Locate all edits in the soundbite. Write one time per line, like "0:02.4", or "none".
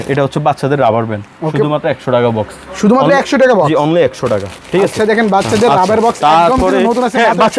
none